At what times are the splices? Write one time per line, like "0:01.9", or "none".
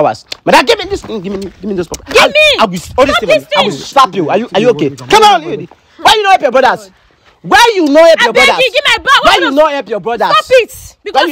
none

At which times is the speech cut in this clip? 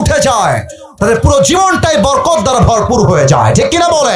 none

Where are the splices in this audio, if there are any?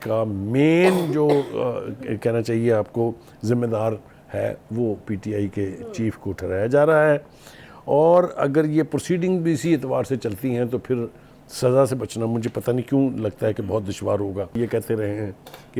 0:14.6

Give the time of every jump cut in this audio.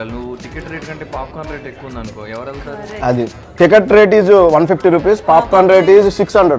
0:03.4

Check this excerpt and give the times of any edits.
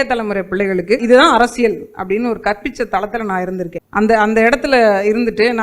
0:01.0
0:03.8

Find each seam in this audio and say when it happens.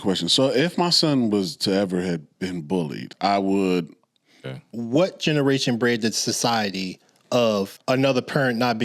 0:03.0
0:04.4
0:07.8

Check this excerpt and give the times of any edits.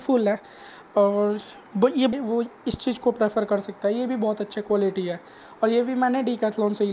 0:02.1

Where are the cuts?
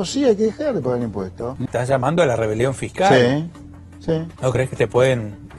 0:01.4
0:04.3

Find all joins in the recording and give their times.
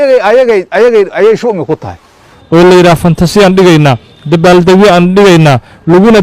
0:02.3

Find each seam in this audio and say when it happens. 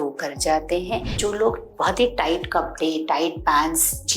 0:01.2

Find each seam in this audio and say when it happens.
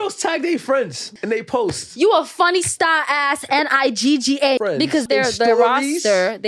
0:01.1
0:04.9

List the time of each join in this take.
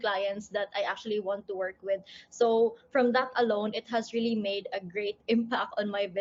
none

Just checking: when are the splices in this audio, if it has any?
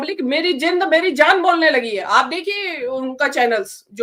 none

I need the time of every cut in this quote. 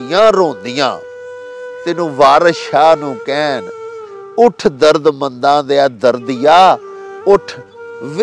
none

